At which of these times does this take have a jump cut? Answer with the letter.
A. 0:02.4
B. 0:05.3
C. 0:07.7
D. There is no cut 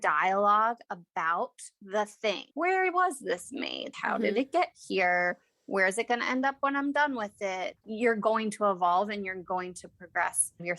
C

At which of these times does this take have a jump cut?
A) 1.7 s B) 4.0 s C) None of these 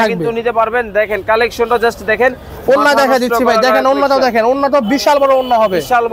C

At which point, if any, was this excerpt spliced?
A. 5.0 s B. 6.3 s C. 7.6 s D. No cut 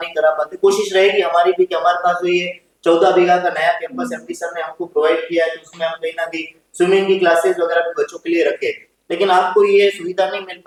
D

